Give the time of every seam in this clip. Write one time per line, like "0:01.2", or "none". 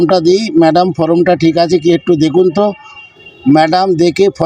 none